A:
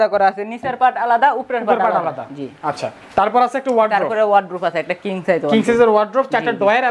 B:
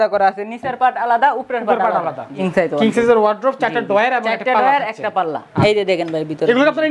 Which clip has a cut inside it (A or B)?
B